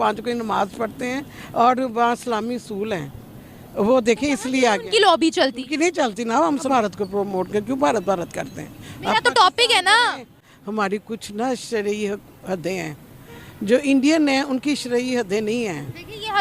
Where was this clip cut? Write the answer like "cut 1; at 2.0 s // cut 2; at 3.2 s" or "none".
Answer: cut 1; at 6.7 s